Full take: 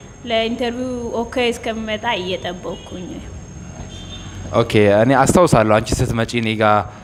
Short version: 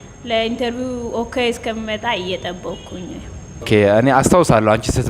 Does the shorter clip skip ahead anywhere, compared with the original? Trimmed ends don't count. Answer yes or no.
yes